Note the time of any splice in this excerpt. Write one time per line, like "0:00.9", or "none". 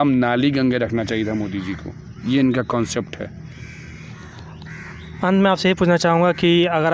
none

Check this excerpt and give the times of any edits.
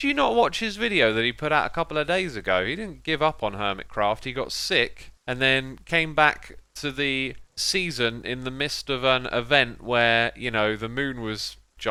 none

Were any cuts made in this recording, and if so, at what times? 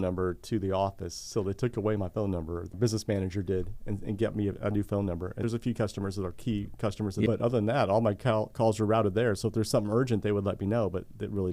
0:02.7
0:05.4
0:07.3

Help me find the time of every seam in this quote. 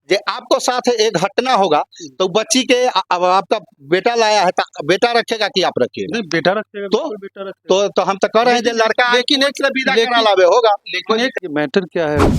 0:11.4

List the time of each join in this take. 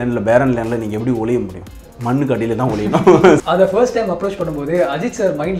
0:03.4

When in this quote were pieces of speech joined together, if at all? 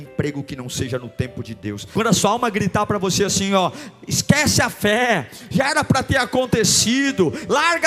0:01.8

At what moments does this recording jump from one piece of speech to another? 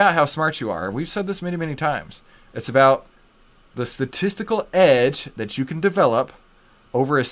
none

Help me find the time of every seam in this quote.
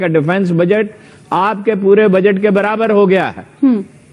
none

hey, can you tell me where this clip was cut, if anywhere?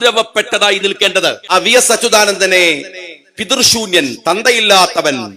0:01.4

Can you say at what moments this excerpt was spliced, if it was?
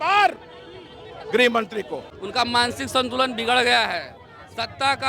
0:02.1

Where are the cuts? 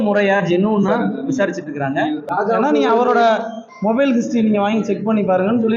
0:02.3

